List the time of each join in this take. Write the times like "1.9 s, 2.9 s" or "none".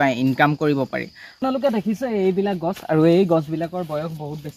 1.3 s